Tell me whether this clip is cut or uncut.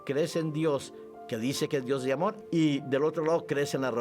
cut